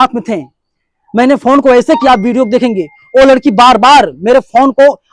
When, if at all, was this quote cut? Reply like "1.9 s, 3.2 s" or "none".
none